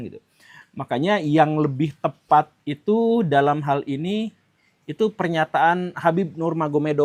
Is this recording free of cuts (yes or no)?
yes